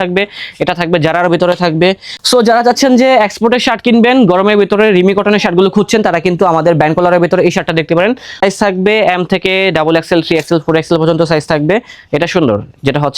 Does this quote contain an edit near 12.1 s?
no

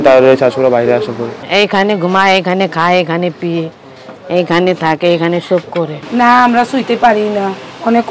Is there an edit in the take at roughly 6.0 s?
yes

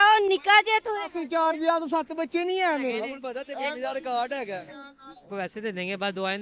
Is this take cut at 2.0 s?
no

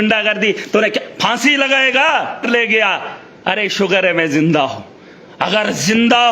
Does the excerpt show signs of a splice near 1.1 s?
no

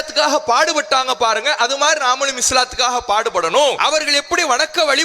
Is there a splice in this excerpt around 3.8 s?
yes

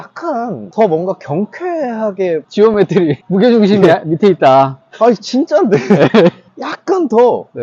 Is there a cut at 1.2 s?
no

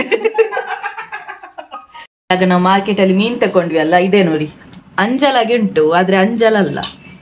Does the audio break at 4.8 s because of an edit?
no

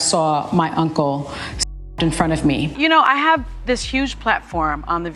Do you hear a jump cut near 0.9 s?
no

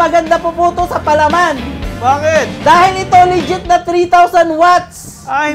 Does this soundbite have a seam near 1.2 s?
no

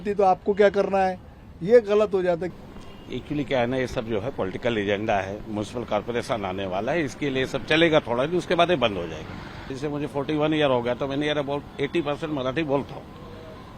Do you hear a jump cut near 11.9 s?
no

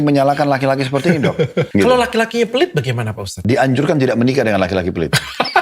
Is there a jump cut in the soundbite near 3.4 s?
yes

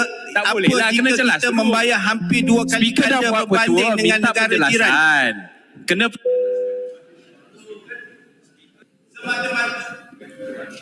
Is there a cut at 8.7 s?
yes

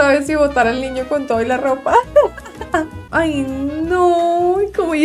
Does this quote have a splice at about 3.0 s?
yes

